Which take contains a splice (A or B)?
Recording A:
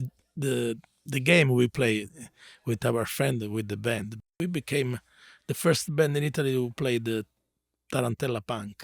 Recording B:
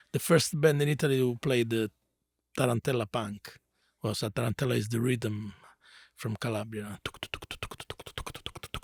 A